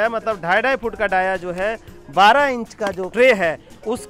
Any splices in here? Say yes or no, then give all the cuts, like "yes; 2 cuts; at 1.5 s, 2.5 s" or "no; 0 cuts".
yes; 1 cut; at 3.0 s